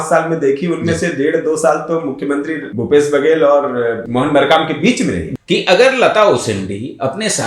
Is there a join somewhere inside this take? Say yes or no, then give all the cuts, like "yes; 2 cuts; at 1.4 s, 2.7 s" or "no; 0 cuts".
yes; 3 cuts; at 2.6 s, 4.0 s, 5.3 s